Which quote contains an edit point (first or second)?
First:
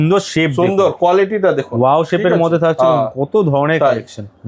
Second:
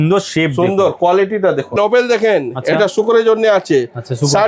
second